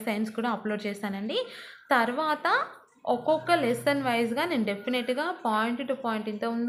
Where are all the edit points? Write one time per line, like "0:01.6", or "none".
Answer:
none